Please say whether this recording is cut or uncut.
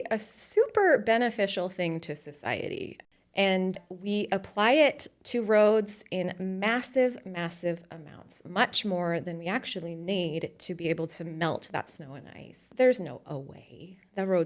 cut